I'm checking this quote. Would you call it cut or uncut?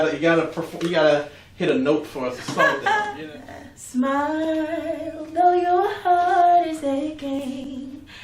cut